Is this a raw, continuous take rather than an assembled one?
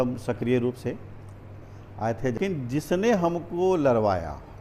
no; 1 cut; at 2.4 s

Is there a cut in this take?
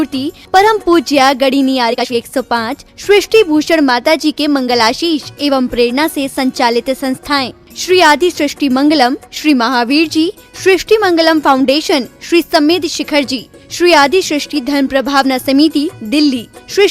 yes; 1 cut; at 1.9 s

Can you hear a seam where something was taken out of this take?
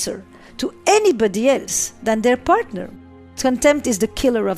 yes; 1 cut; at 2.8 s

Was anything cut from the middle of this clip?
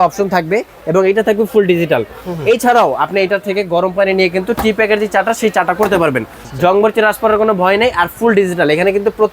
yes; 1 cut; at 6.4 s

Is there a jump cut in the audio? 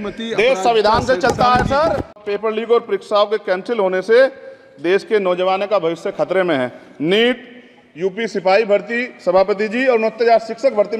yes; 1 cut; at 2.1 s

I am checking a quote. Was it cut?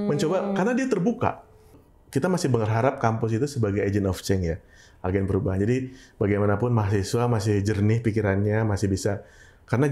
yes; 1 cut; at 1.8 s

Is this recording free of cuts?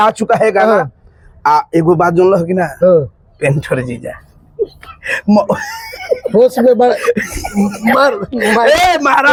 yes; 0 cuts

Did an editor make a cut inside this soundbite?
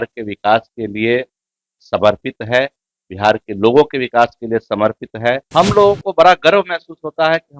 yes; 1 cut; at 5.4 s

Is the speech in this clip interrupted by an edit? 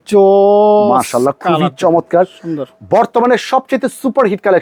no; 0 cuts

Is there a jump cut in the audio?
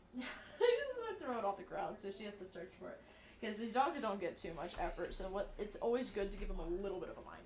no; 0 cuts

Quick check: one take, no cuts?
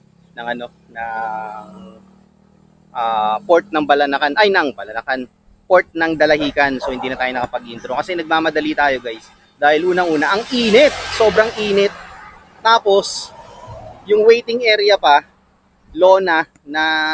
yes; 0 cuts

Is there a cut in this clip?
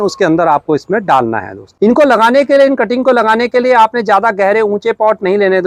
yes; 1 cut; at 1.6 s

